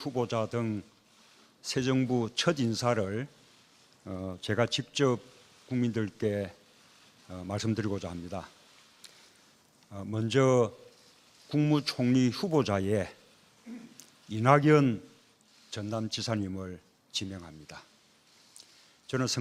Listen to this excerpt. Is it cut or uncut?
uncut